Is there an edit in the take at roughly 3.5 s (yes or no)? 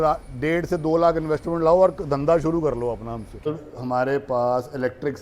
yes